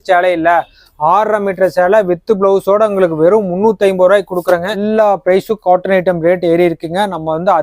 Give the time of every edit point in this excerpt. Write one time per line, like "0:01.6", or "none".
0:04.8

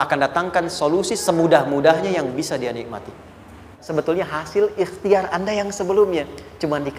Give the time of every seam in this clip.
0:03.8

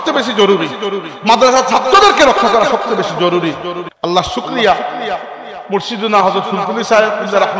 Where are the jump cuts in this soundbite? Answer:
0:03.8

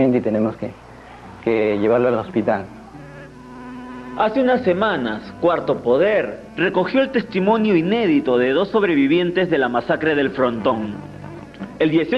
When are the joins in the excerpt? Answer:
0:08.7

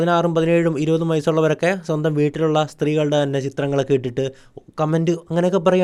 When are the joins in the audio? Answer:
none

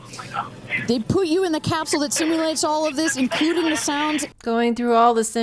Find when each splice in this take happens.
0:04.3

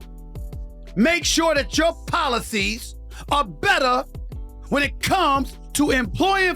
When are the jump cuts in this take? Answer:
0:00.9

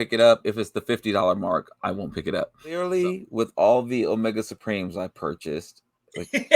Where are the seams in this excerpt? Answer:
0:02.8

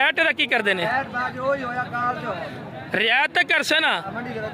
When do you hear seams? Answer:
none

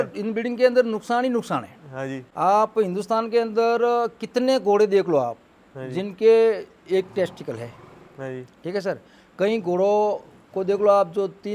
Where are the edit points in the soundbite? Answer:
0:02.2

